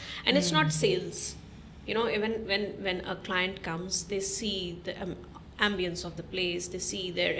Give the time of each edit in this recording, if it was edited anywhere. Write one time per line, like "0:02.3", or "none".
none

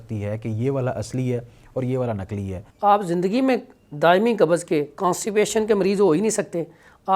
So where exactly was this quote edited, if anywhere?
0:02.6

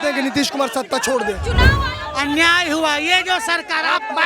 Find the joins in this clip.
0:01.7

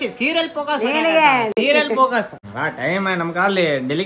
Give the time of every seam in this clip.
0:02.4

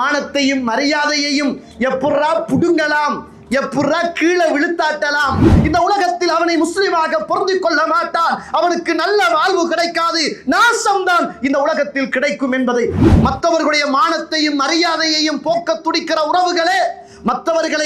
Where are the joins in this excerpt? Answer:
0:05.6
0:13.0

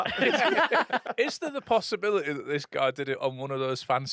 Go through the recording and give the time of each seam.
0:01.0

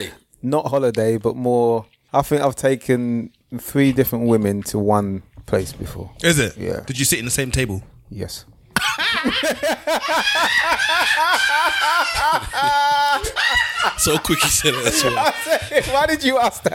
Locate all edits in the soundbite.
0:02.0

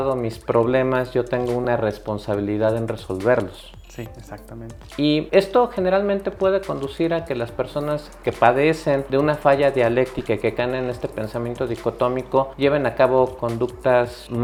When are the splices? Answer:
none

